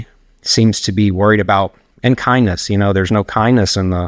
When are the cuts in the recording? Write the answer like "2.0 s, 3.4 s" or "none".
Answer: 1.9 s